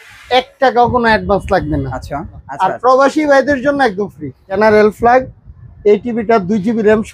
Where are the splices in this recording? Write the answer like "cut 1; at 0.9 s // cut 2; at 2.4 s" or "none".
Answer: cut 1; at 2.4 s // cut 2; at 4.6 s